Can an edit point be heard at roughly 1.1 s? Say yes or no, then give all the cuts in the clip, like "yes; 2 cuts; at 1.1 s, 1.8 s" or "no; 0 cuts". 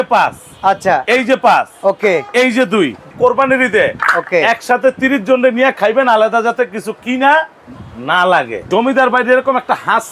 no; 2 cuts; at 3.1 s, 8.6 s